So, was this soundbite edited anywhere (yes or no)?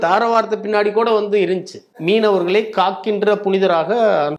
yes